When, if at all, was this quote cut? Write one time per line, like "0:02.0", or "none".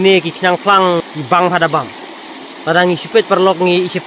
0:01.0